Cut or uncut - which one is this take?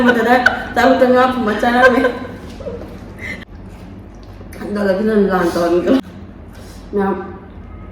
cut